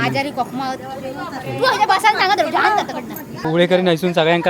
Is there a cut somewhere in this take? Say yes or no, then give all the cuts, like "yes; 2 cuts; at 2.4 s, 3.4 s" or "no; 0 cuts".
yes; 1 cut; at 3.3 s